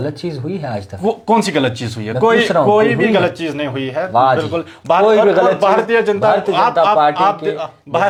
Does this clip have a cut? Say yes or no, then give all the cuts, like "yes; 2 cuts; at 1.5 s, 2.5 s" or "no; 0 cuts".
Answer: no; 0 cuts